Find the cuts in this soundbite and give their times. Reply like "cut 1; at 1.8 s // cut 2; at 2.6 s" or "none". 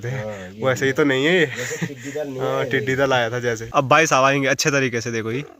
cut 1; at 3.6 s